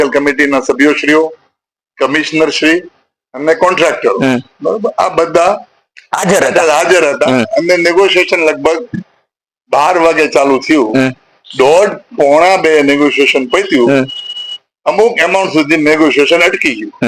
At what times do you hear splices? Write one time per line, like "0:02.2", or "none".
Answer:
none